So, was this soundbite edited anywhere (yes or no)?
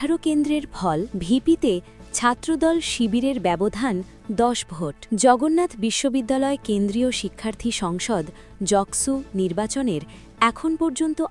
yes